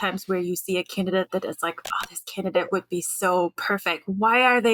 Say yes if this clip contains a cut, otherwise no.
no